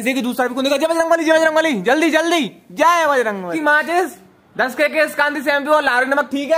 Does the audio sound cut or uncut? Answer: cut